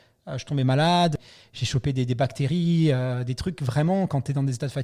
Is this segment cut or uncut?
cut